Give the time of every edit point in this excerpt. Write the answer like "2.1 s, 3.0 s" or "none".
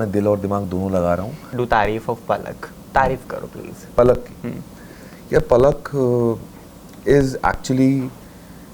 1.4 s